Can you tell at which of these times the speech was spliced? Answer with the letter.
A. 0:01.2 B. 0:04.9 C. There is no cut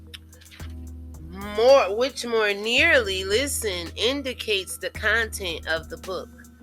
A